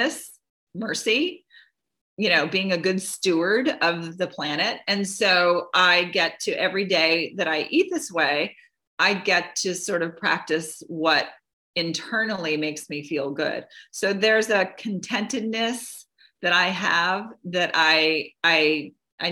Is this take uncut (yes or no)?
yes